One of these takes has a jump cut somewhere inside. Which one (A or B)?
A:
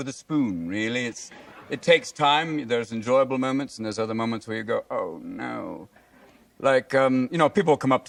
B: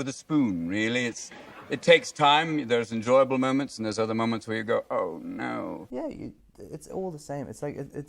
B